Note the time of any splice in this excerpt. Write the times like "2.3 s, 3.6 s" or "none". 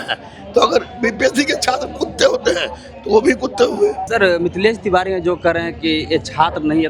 4.0 s